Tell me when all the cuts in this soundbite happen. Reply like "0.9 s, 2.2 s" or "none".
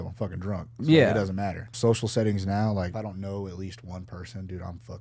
1.7 s, 2.9 s